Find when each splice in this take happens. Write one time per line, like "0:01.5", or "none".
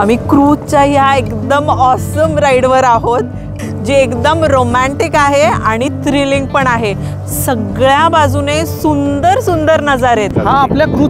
none